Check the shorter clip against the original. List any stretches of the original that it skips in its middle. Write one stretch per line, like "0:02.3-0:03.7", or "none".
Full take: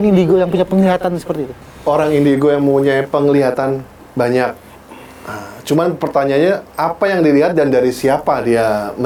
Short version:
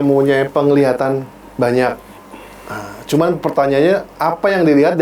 none

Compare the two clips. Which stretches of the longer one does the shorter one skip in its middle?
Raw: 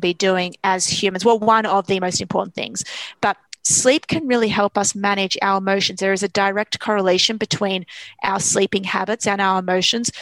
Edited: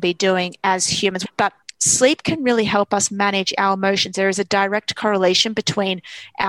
0:01.2-0:03.0

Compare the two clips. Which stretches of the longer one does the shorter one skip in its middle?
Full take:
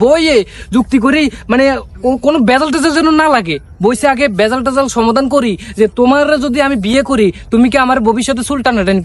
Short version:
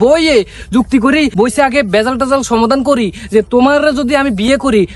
0:01.3-0:03.8

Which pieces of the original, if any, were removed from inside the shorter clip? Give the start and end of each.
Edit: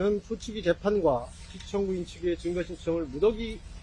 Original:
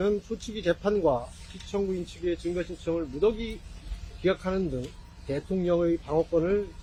none

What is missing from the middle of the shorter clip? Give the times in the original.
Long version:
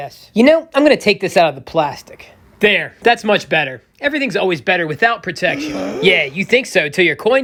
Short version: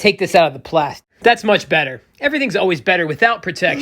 0:02.1-0:02.9

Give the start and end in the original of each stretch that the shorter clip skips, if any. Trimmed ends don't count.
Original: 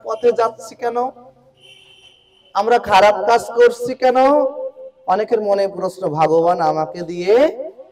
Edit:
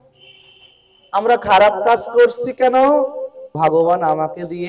0:04.9-0:06.0

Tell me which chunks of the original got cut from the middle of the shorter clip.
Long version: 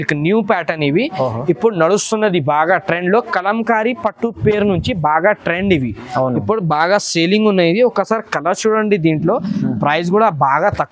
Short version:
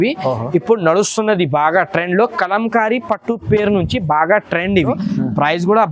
0:05.9-0:09.4

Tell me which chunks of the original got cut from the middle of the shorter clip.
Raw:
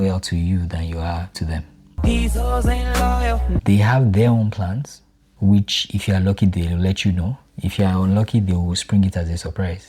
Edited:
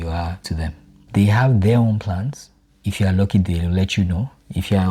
0:02.0-0:03.6
0:05.2-0:05.8

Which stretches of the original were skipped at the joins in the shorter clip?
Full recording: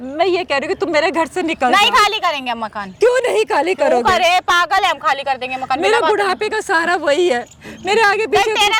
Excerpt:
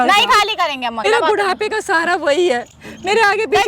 0:02.7-0:05.8

